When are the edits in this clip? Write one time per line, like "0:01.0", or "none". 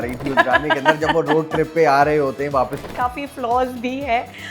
0:02.8